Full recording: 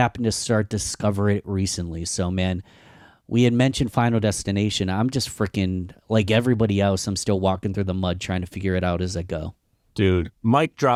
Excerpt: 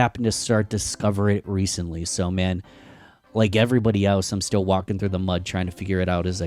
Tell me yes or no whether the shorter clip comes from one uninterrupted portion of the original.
no